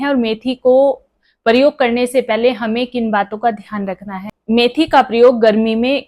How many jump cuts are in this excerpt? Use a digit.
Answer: 1